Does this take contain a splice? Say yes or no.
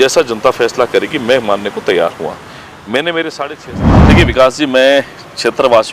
yes